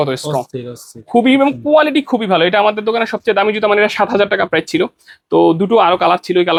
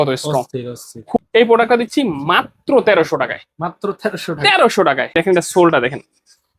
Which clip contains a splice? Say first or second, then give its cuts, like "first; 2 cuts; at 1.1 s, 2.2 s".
second; 2 cuts; at 1.2 s, 5.1 s